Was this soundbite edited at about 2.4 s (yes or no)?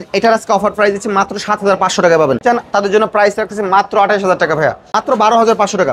yes